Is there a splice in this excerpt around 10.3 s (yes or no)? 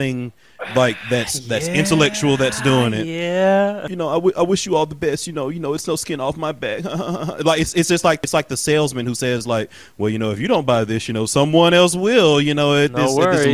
no